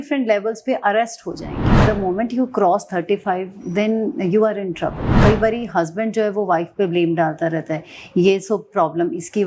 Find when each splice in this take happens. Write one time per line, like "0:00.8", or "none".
0:01.8
0:05.1